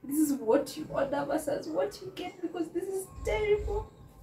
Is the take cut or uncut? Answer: uncut